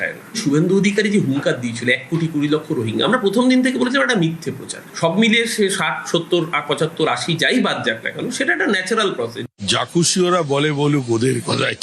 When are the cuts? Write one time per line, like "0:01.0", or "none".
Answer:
0:09.3